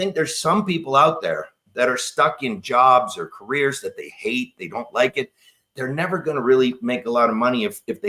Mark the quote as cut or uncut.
uncut